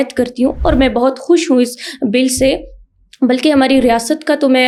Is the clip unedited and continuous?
yes; 0 cuts

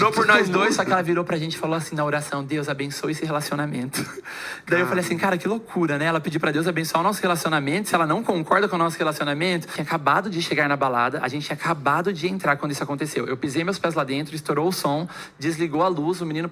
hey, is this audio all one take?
no; 1 cut; at 9.8 s

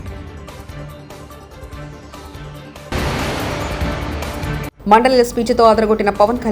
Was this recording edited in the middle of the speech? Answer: no; 0 cuts

